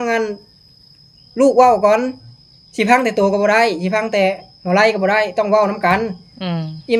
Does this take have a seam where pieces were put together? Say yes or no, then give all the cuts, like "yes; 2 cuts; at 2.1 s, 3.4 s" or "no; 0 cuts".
no; 0 cuts